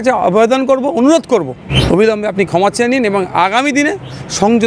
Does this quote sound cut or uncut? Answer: cut